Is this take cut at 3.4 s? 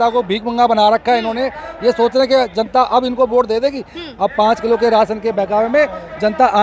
no; 0 cuts

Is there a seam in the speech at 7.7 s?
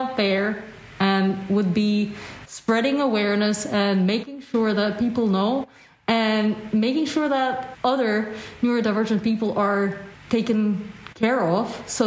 yes; 2 cuts; at 7.7 s, 10.1 s

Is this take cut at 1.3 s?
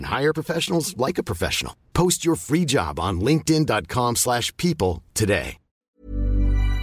no; 1 cut; at 5.8 s

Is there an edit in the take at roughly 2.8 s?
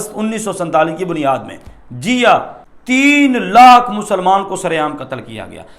yes; 1 cut; at 2.8 s

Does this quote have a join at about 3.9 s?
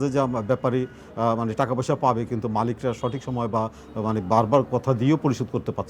no; 0 cuts

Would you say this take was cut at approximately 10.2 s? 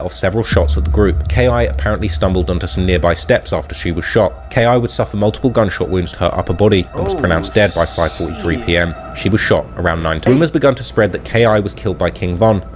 yes; 1 cut; at 10.2 s

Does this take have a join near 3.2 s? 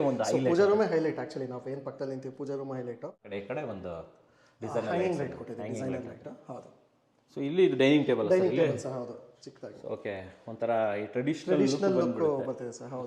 yes; 1 cut; at 3.2 s

